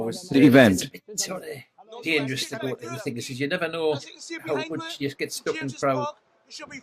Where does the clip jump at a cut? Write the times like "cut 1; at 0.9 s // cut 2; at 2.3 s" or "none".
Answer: none